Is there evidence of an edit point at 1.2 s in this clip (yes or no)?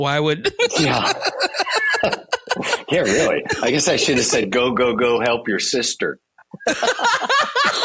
no